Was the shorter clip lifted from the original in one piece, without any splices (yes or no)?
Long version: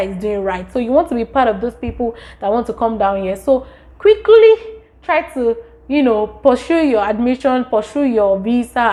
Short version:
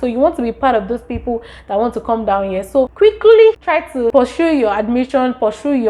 no